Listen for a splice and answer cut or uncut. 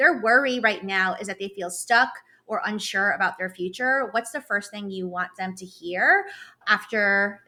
uncut